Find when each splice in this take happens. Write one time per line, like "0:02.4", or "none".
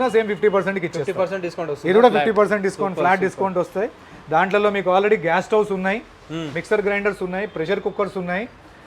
none